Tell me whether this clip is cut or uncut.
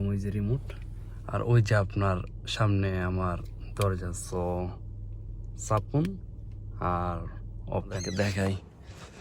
cut